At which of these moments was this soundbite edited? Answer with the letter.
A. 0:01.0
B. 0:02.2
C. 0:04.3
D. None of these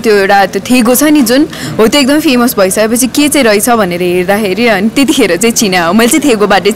D